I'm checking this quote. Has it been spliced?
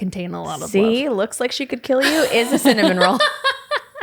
no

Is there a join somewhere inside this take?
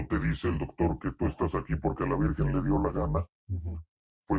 no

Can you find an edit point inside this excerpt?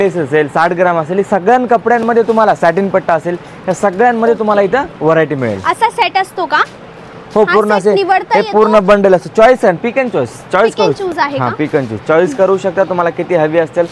no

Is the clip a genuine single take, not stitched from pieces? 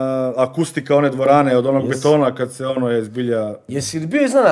no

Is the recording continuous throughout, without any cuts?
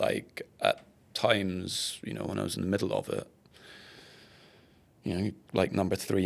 yes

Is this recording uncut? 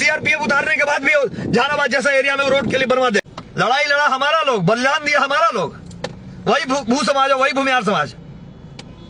no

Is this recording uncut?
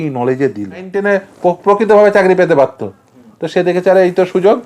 no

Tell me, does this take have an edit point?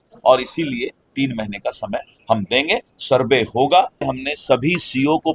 yes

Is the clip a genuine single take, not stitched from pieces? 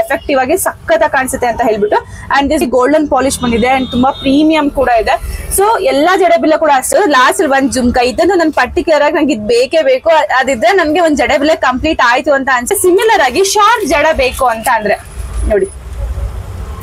no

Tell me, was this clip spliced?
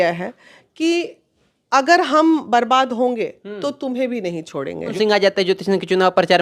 yes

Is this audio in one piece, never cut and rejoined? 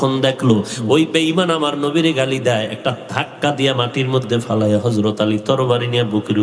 yes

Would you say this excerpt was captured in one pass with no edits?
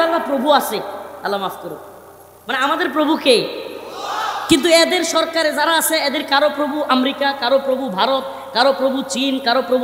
yes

